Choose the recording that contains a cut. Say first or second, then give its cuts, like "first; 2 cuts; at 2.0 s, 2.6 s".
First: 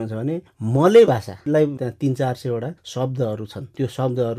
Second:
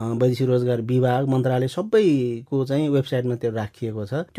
first; 1 cut; at 1.8 s